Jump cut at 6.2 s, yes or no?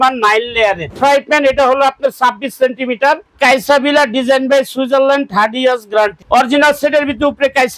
yes